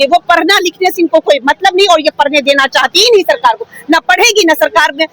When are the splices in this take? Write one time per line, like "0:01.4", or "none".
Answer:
none